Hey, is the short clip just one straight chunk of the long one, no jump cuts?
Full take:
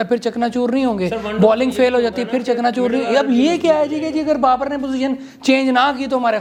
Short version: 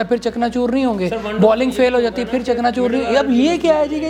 yes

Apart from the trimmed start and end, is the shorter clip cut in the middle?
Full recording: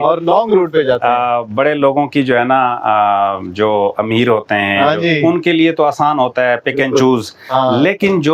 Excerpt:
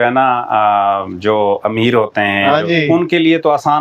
no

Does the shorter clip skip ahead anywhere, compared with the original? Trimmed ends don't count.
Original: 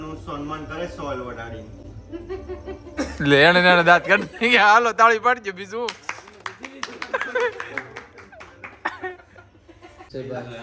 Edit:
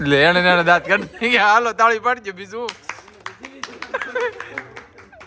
no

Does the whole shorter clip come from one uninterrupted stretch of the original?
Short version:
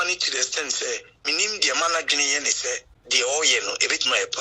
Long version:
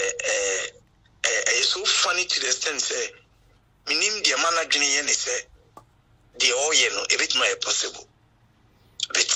no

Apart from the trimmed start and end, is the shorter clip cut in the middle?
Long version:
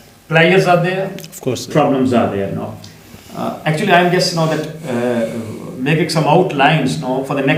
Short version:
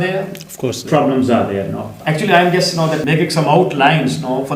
yes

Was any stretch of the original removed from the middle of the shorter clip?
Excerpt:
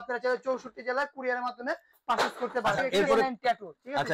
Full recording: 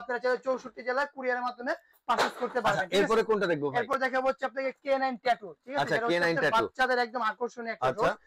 yes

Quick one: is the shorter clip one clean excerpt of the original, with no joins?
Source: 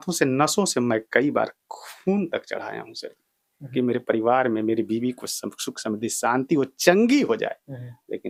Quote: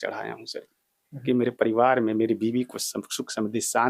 yes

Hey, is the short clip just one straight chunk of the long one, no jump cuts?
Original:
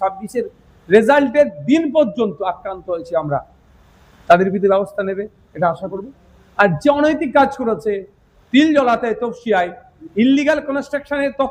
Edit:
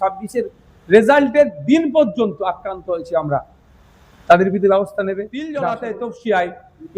no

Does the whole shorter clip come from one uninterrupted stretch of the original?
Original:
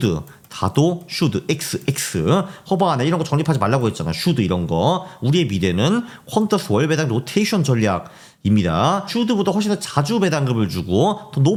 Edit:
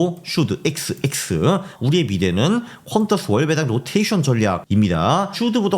no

